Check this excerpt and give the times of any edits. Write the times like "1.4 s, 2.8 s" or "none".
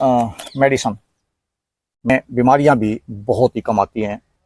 2.1 s